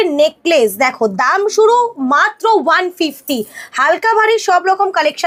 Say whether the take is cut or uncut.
uncut